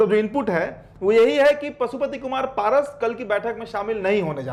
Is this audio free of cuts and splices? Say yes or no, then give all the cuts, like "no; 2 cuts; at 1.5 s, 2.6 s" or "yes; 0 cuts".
yes; 0 cuts